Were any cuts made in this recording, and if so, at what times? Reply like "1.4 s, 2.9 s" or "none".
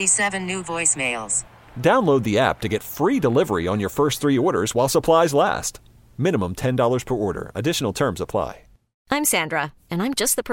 9.0 s